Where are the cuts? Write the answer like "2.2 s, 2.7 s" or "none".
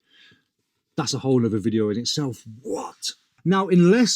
3.2 s

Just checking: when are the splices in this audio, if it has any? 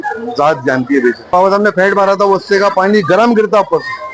1.3 s

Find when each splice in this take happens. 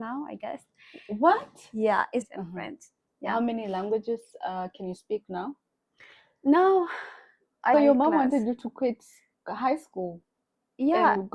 2.3 s, 7.7 s

